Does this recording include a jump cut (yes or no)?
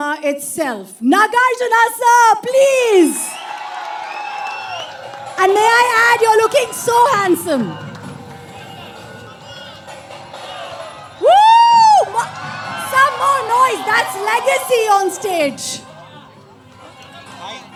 no